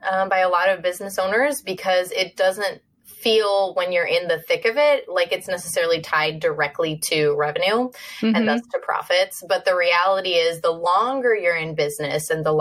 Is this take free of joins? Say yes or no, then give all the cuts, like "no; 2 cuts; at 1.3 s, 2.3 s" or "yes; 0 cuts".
yes; 0 cuts